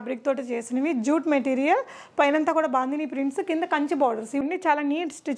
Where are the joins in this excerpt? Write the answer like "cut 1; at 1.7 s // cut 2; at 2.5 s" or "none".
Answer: cut 1; at 4.4 s